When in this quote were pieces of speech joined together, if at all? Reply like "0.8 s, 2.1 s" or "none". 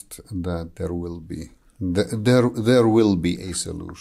none